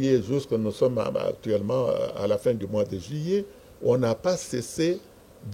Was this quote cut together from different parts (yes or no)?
no